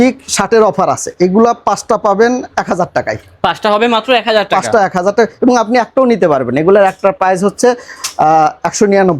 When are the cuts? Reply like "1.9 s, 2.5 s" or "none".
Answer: none